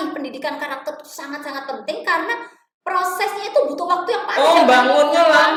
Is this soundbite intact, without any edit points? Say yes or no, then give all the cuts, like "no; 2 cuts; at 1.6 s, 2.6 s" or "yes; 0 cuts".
yes; 0 cuts